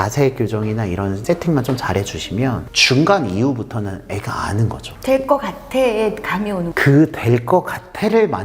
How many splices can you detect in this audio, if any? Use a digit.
4